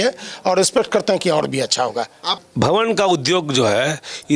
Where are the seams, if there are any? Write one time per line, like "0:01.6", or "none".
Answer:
0:02.3

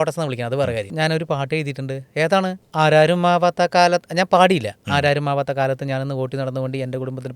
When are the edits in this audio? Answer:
0:00.9
0:02.6

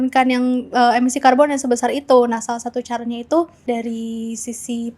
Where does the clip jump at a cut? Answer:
0:03.6

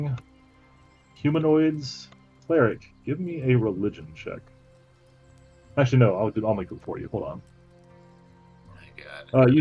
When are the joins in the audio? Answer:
0:02.3

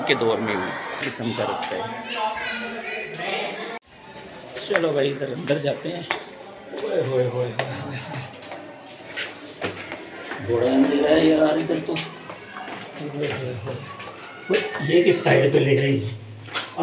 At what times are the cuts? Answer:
0:01.1

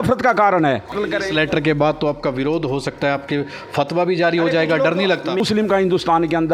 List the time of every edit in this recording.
0:00.9
0:05.4

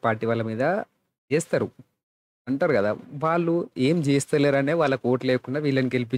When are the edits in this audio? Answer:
none

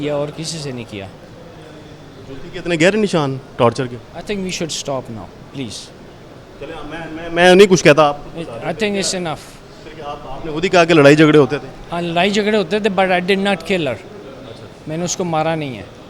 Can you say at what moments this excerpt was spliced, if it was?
none

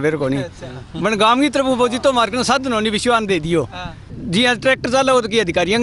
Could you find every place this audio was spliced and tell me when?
0:04.1

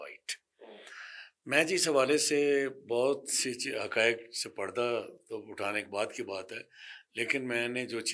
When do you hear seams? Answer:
none

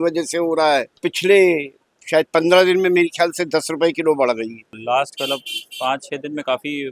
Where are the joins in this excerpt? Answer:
0:01.1
0:04.7

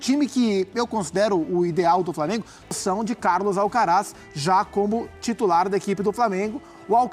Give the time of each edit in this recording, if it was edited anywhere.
0:02.8

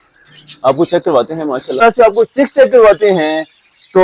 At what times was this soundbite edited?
0:01.8

